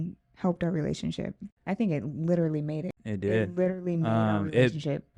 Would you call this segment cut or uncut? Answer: cut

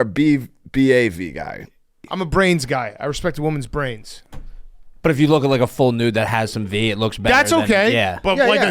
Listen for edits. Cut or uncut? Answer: cut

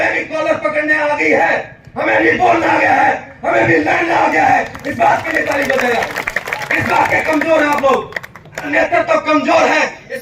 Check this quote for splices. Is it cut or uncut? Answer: cut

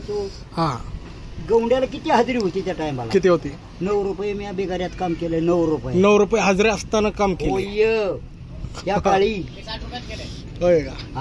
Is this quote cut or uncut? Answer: uncut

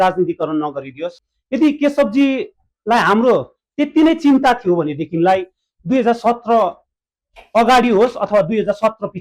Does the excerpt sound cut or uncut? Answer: cut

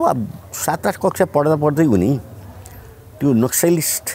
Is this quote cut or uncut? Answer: uncut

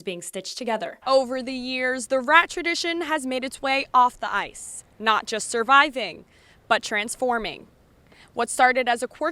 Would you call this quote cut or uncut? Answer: cut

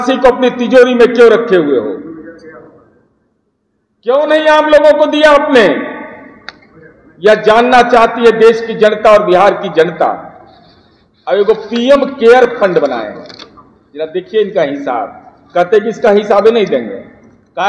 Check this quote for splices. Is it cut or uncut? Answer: uncut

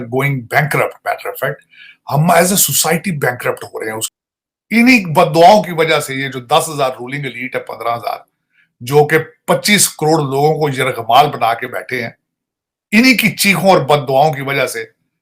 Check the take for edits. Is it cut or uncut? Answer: cut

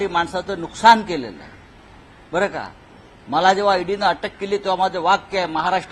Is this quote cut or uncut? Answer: uncut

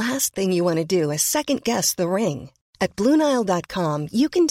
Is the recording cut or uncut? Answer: uncut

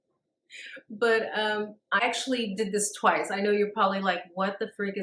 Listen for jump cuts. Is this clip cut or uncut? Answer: cut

